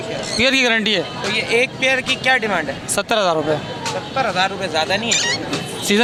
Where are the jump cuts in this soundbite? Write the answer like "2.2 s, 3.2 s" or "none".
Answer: none